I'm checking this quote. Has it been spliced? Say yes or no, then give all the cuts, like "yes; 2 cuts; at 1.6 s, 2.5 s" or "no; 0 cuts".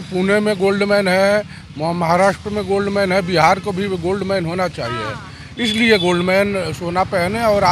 no; 0 cuts